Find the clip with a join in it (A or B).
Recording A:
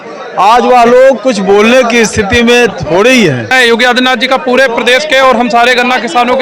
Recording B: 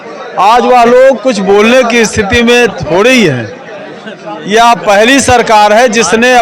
A